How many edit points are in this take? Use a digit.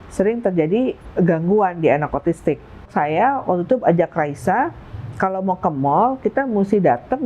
2